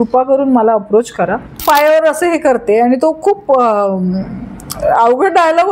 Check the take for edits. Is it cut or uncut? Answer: cut